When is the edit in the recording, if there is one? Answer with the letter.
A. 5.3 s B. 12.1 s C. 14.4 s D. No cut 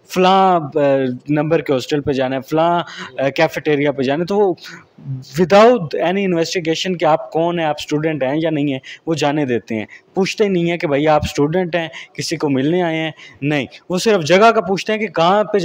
D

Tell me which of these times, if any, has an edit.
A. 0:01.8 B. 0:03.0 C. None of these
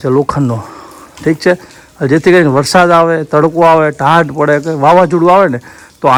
C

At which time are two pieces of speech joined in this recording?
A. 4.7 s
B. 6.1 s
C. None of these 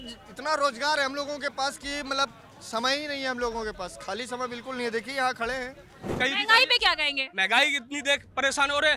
B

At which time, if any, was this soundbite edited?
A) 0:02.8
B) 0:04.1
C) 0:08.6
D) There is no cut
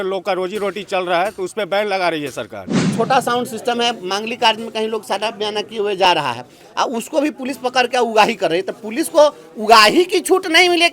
A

